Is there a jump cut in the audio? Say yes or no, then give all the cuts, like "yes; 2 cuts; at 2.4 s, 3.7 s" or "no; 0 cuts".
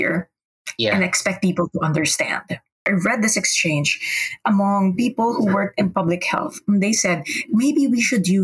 yes; 1 cut; at 2.8 s